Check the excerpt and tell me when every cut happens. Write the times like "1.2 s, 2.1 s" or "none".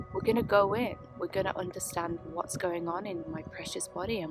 3.3 s